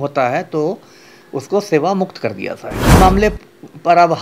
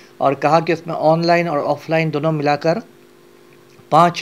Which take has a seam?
first; 1 cut; at 2.9 s

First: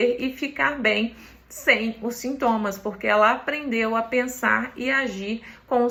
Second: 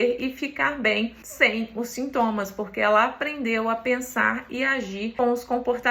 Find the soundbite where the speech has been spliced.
second; 2 cuts; at 1.2 s, 5.1 s

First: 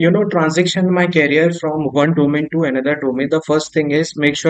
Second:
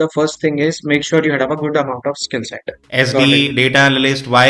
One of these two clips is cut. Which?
second; 1 cut; at 2.8 s

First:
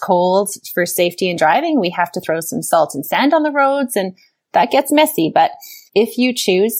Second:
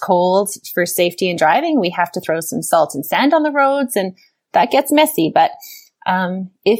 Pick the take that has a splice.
first; 1 cut; at 5.7 s

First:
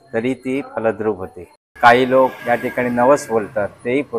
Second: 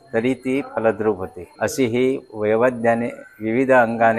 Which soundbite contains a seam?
first; 2 cuts; at 1.4 s, 2.4 s

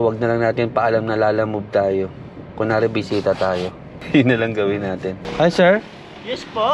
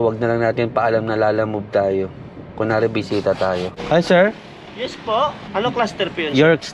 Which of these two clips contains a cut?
second; 2 cuts; at 3.8 s, 5.5 s

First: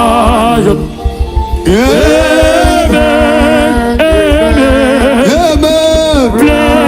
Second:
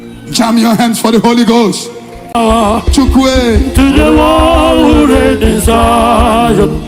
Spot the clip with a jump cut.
second; 1 cut; at 2.4 s

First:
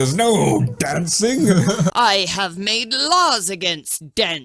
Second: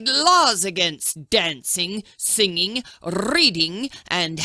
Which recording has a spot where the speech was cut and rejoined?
first; 1 cut; at 1.9 s

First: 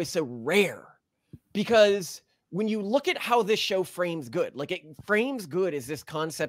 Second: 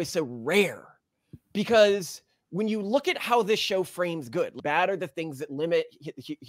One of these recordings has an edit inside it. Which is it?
second; 1 cut; at 4.5 s

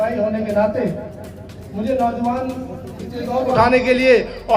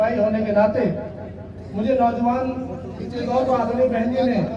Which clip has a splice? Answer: first; 1 cut; at 3.6 s

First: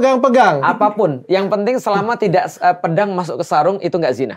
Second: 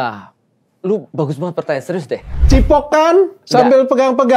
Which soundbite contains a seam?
second; 1 cut; at 2.4 s

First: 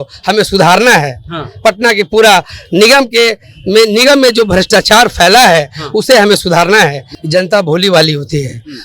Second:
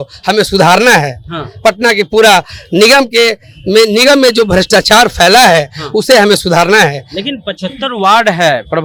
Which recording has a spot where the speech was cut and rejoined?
first; 1 cut; at 7.1 s

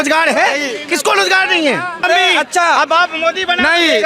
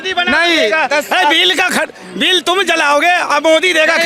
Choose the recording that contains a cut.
first; 1 cut; at 2.1 s

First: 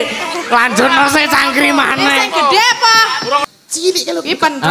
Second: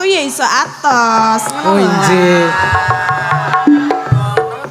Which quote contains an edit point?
first; 1 cut; at 3.4 s

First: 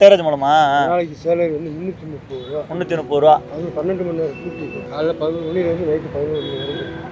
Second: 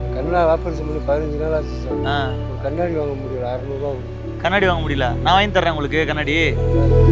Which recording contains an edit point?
first; 1 cut; at 4.7 s

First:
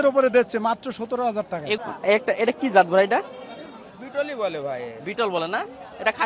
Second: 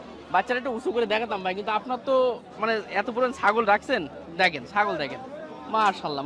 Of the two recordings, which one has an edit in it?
first; 1 cut; at 1.8 s

